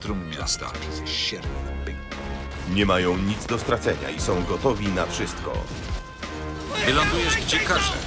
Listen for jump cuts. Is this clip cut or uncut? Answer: uncut